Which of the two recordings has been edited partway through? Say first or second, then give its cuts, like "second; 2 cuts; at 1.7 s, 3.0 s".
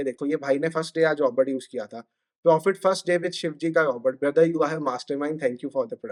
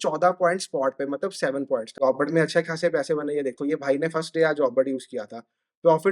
second; 1 cut; at 1.9 s